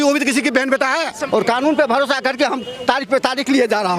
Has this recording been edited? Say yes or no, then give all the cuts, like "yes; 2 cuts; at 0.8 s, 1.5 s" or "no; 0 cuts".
yes; 1 cut; at 1.2 s